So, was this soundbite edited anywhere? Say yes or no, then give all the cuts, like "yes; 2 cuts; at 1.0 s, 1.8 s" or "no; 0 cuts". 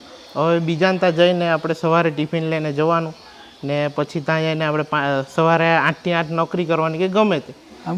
no; 0 cuts